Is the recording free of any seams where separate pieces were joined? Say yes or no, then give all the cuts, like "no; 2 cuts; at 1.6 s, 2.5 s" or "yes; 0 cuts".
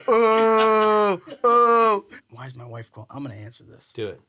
no; 1 cut; at 2.2 s